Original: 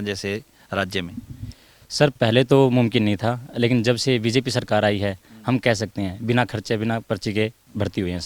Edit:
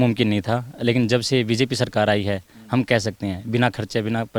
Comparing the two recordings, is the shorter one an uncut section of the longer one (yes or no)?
yes